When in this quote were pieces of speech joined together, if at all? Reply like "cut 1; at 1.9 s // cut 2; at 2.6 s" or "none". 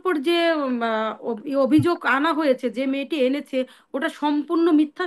none